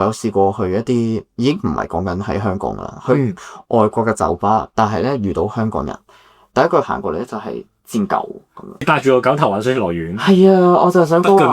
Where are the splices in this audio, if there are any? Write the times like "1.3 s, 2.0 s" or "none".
8.8 s